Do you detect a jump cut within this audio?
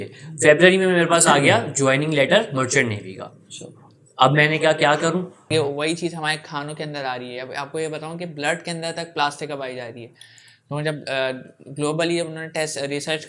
yes; 1 cut; at 5.5 s

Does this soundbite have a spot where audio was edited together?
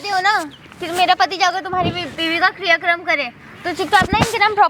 no; 0 cuts

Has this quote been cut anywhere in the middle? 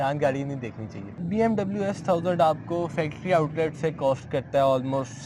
yes; 1 cut; at 1.0 s

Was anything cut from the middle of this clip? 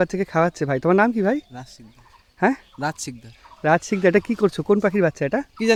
no; 0 cuts

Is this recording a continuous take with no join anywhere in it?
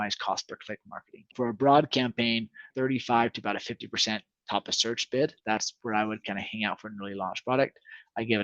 no; 3 cuts; at 1.3 s, 2.6 s, 5.4 s

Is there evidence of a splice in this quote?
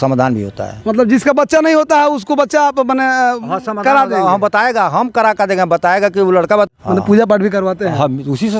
yes; 1 cut; at 6.7 s

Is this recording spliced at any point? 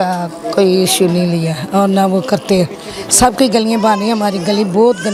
no; 0 cuts

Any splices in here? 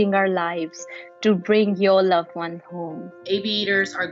yes; 1 cut; at 3.1 s

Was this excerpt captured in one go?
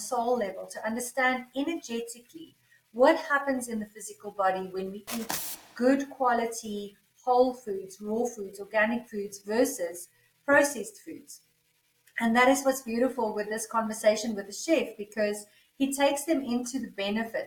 yes; 0 cuts

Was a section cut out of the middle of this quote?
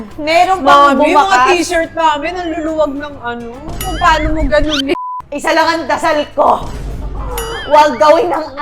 yes; 1 cut; at 5.0 s

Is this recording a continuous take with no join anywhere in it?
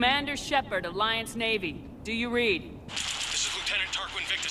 yes; 0 cuts

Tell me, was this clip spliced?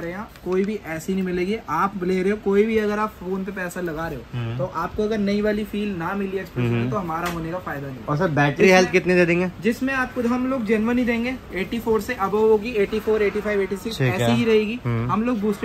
no; 0 cuts

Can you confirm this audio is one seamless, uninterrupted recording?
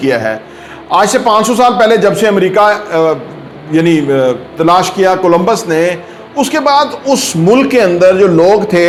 yes; 0 cuts

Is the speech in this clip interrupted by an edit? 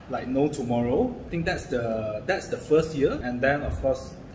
yes; 2 cuts; at 1.2 s, 3.2 s

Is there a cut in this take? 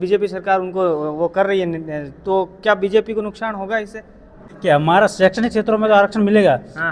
yes; 1 cut; at 4.5 s

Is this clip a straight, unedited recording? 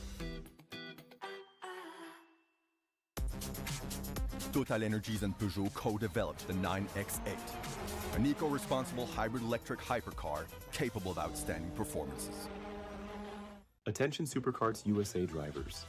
no; 1 cut; at 13.8 s

